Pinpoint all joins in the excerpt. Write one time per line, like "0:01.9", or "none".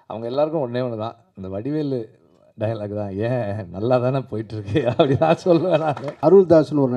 0:06.1